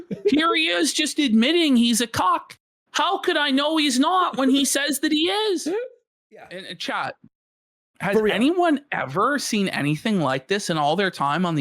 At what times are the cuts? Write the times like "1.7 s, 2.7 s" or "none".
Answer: 6.6 s